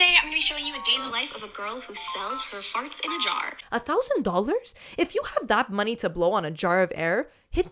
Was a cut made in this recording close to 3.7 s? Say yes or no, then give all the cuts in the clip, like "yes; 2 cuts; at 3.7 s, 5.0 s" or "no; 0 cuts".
yes; 1 cut; at 3.7 s